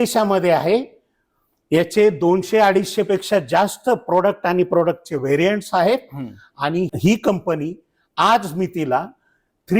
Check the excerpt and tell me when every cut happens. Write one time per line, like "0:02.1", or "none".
0:06.9